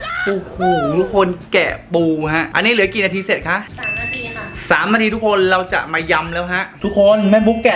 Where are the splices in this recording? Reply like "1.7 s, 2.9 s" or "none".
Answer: none